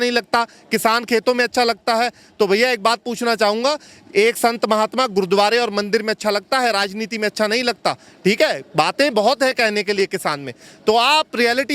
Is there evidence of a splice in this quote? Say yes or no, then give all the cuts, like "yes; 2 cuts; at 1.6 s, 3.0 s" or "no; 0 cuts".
no; 0 cuts